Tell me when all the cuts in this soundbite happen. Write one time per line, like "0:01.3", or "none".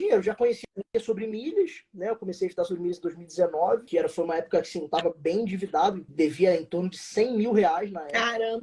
0:03.9
0:06.0